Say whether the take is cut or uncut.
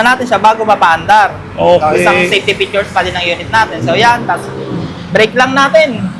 uncut